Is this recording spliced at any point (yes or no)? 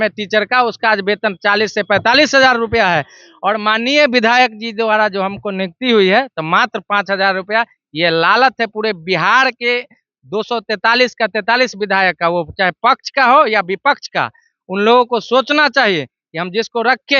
no